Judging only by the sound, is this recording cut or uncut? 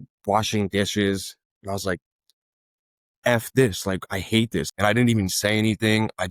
cut